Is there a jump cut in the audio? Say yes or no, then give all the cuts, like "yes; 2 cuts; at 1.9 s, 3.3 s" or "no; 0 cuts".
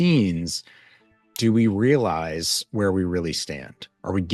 no; 0 cuts